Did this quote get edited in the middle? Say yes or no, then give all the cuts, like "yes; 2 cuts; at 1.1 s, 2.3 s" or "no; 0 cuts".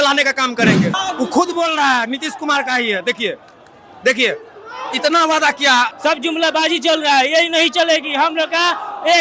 yes; 2 cuts; at 1.0 s, 5.9 s